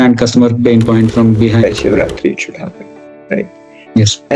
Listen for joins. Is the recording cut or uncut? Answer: cut